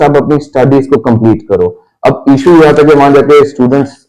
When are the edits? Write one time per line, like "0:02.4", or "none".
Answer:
none